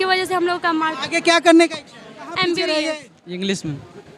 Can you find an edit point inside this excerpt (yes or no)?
yes